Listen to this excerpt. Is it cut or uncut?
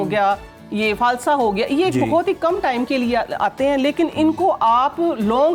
uncut